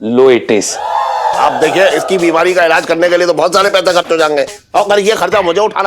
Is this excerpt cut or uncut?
cut